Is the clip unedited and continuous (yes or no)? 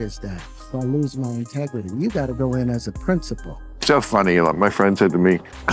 no